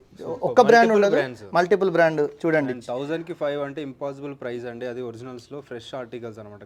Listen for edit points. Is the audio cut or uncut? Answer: uncut